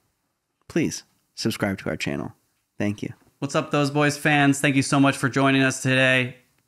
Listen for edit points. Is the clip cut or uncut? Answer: cut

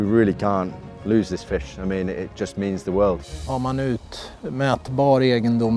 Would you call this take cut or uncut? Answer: cut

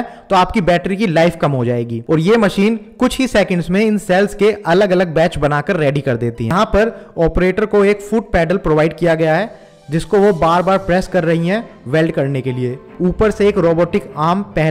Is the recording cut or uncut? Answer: cut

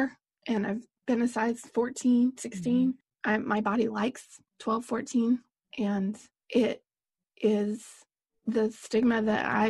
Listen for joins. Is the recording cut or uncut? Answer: cut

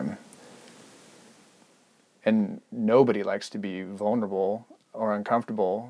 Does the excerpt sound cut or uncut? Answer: uncut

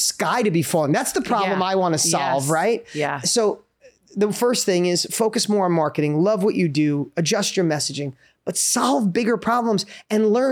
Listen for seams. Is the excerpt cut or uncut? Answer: uncut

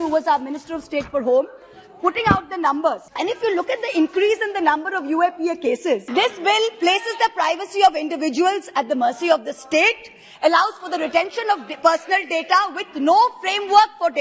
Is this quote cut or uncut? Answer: cut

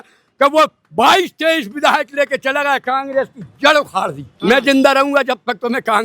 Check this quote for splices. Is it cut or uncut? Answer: cut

